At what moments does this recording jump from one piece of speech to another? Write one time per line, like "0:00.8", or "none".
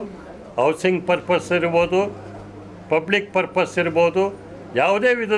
none